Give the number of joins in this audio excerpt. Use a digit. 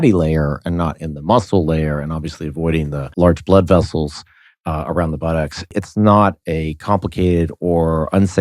2